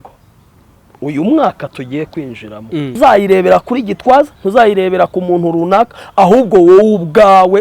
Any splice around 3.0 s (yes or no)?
yes